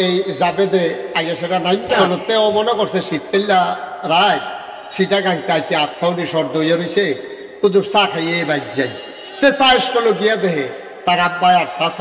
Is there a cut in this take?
yes; 1 cut; at 2.0 s

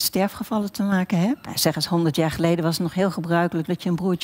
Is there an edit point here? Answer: yes; 1 cut; at 1.6 s

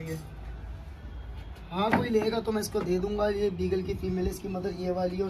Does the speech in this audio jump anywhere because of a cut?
no; 0 cuts

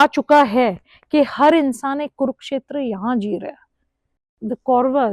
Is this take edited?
yes; 1 cut; at 4.2 s

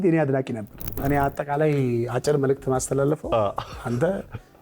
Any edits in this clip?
yes; 1 cut; at 1.0 s

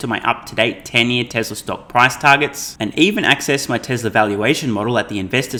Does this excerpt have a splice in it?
no; 0 cuts

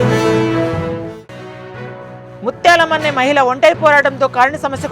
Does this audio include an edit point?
yes; 1 cut; at 2.1 s

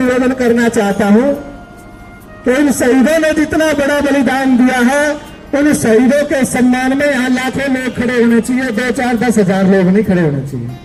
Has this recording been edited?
no; 0 cuts

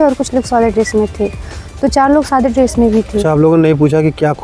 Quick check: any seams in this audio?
no; 0 cuts

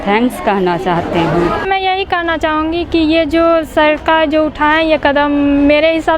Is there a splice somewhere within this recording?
yes; 1 cut; at 1.6 s

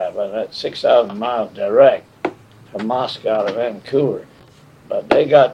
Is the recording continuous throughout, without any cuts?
yes; 0 cuts

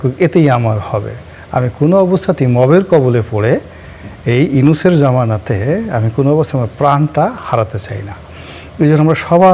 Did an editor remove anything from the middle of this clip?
no; 0 cuts

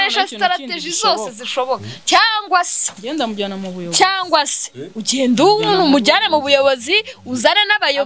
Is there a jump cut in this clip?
no; 0 cuts

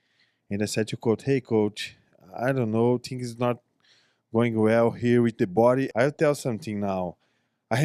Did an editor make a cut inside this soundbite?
yes; 1 cut; at 5.9 s

